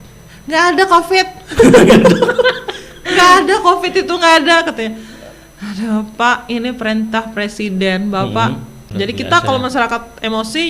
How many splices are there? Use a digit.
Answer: 1